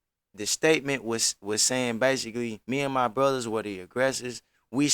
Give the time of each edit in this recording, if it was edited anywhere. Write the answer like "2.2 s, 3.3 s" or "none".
2.6 s